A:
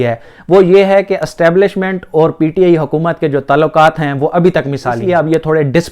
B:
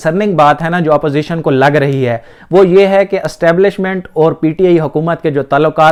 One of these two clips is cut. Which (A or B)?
A